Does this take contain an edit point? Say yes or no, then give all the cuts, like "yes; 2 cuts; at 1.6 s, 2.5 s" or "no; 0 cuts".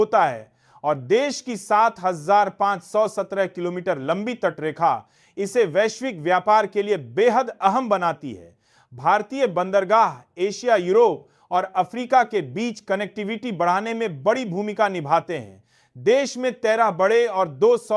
no; 0 cuts